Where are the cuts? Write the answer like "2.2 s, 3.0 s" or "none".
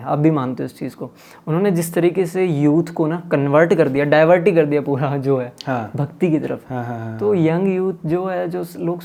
none